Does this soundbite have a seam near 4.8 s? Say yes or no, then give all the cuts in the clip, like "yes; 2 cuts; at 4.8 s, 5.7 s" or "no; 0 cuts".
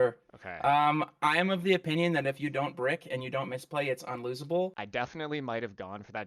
yes; 1 cut; at 4.8 s